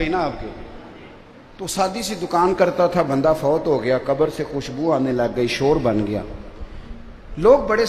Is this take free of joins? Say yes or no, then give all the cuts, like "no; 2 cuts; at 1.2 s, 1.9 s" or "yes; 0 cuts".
yes; 0 cuts